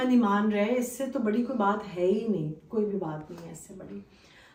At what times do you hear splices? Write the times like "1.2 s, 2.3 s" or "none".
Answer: none